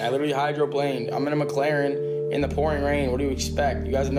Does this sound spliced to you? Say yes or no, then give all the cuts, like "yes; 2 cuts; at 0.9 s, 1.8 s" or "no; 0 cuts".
no; 0 cuts